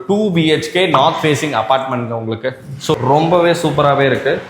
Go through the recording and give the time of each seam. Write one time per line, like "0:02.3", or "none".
0:02.9